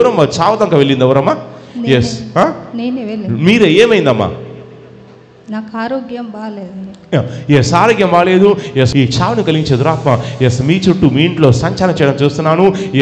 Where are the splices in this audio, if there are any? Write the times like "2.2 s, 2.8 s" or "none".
8.9 s